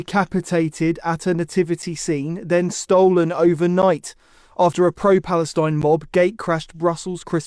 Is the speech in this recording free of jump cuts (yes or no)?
yes